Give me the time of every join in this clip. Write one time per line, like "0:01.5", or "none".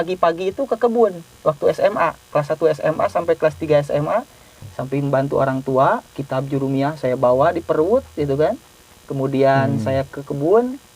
0:04.5